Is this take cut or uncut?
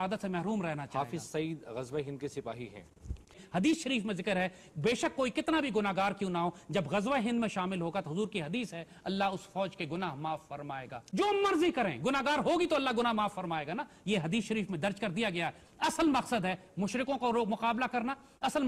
cut